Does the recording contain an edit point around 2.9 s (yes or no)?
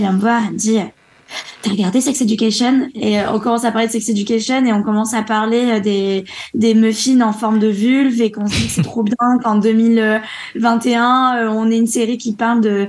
yes